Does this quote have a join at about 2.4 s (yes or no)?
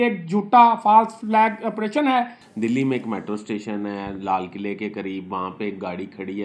yes